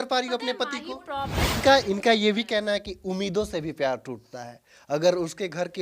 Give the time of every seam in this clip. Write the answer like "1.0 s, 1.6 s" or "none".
1.6 s